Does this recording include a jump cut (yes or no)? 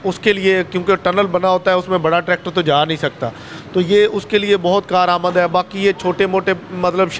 no